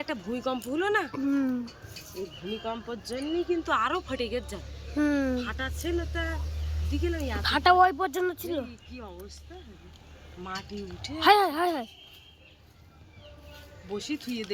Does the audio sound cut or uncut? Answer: uncut